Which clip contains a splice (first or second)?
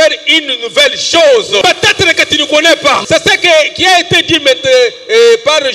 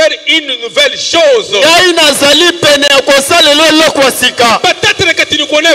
first